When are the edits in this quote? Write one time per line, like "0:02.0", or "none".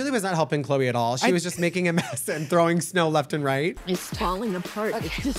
none